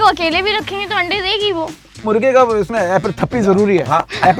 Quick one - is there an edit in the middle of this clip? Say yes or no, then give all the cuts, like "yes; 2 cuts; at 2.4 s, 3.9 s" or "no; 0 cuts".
yes; 1 cut; at 2.1 s